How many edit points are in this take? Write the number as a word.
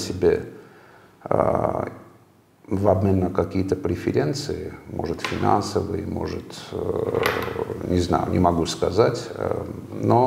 zero